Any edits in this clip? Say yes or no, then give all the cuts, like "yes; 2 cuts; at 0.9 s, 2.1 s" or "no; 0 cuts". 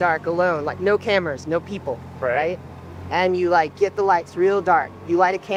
no; 0 cuts